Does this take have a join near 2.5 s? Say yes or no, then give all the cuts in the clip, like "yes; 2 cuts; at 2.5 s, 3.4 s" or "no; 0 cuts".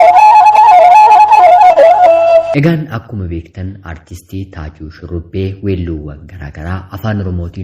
yes; 1 cut; at 2.5 s